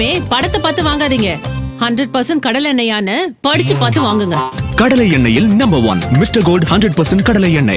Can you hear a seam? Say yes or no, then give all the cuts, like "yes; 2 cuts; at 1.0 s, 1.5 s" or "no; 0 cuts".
no; 0 cuts